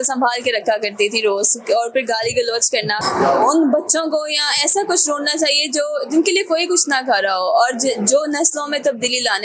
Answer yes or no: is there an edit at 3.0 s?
yes